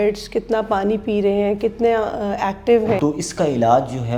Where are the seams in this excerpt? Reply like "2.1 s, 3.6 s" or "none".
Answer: 3.0 s